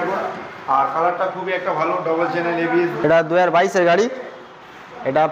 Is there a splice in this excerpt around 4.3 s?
no; 1 cut; at 2.9 s

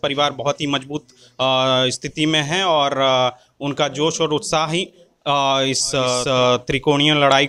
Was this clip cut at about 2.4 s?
no; 0 cuts

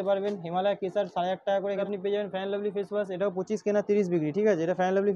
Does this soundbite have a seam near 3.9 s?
no; 1 cut; at 1.8 s

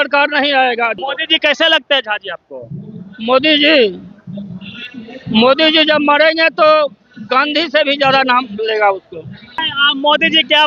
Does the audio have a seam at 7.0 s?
no; 2 cuts; at 0.9 s, 9.7 s

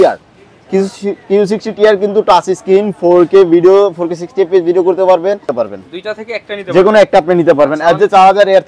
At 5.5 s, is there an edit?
yes; 1 cut; at 5.5 s

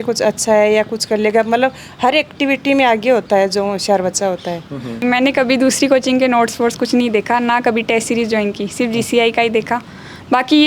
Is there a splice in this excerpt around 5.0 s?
yes; 1 cut; at 5.0 s

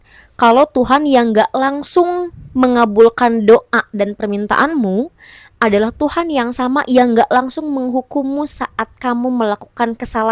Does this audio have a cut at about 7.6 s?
no; 0 cuts

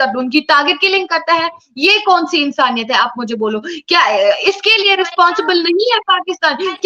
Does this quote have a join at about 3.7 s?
no; 0 cuts

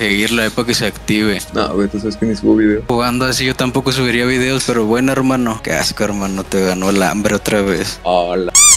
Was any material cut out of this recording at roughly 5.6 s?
yes; 2 cuts; at 1.5 s, 5.6 s

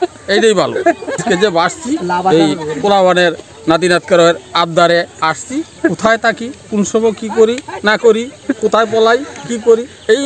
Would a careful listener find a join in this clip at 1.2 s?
yes; 1 cut; at 1.2 s

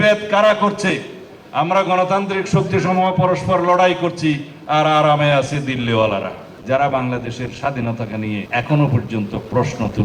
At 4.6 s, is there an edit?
no; 2 cuts; at 1.2 s, 6.5 s

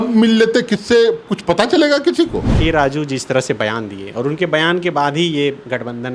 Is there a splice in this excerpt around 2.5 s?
yes; 1 cut; at 2.5 s

